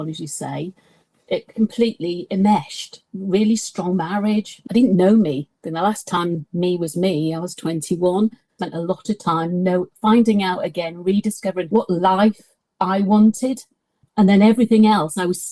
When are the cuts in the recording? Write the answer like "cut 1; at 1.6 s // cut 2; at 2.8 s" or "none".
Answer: cut 1; at 3.1 s // cut 2; at 4.6 s // cut 3; at 8.6 s // cut 4; at 11.6 s // cut 5; at 14.0 s